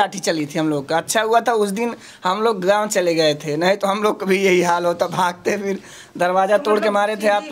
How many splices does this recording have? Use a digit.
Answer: 0